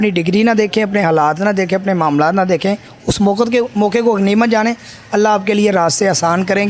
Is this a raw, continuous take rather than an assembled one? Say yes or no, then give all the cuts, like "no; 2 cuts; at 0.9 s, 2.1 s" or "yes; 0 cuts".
yes; 0 cuts